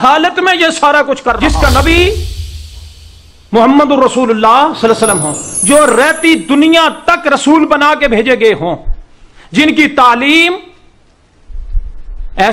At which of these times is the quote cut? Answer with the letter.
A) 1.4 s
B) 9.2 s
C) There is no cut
A